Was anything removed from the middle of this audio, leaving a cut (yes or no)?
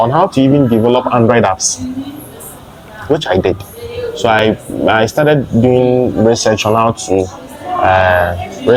no